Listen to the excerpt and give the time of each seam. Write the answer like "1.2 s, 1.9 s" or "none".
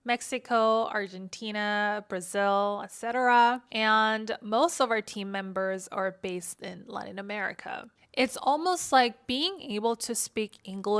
8.0 s

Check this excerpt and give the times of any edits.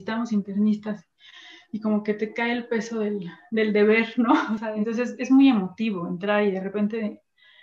4.6 s

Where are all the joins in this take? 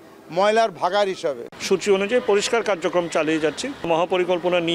1.5 s, 3.9 s

